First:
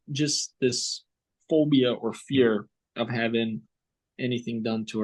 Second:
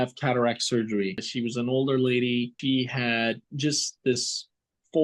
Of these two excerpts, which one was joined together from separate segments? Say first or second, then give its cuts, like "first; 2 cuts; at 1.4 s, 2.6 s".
second; 2 cuts; at 1.2 s, 2.5 s